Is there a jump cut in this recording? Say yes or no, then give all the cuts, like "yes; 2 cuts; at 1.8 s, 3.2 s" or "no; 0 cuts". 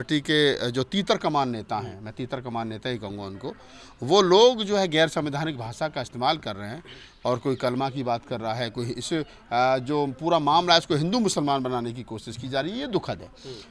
no; 0 cuts